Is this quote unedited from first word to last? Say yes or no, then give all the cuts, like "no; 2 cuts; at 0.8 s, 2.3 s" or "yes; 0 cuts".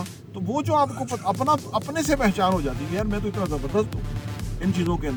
yes; 0 cuts